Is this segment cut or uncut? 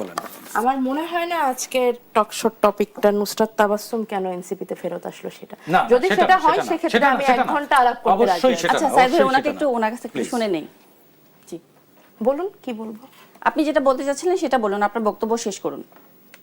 uncut